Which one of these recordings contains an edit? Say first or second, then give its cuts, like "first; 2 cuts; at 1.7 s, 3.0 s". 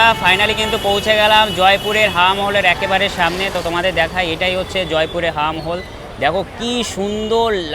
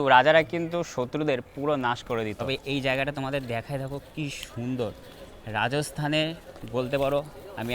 second; 1 cut; at 2.4 s